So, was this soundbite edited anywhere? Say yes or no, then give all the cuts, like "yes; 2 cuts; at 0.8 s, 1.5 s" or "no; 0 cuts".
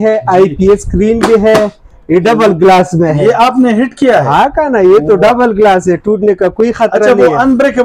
no; 0 cuts